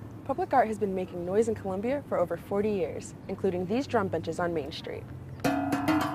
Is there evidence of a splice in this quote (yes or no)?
no